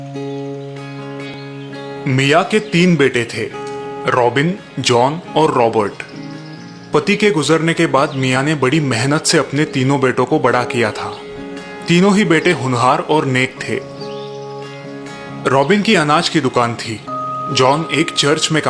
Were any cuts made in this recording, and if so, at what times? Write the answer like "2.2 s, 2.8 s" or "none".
1.3 s